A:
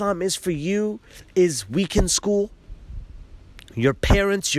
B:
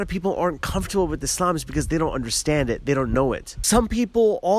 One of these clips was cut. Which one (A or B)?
B